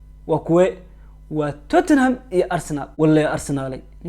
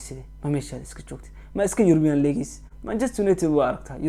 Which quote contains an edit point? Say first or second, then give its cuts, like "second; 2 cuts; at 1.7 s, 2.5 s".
first; 1 cut; at 2.9 s